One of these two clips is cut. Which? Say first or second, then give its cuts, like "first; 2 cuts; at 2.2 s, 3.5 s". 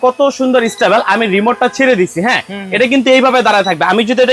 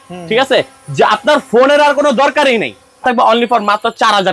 second; 1 cut; at 3.0 s